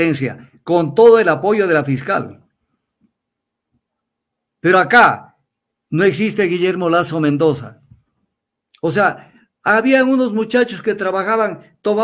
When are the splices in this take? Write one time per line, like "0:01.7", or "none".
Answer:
none